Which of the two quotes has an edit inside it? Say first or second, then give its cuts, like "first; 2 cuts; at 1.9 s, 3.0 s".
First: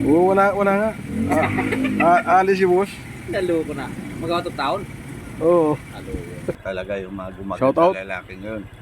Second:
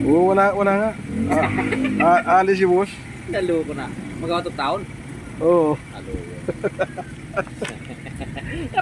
first; 1 cut; at 6.6 s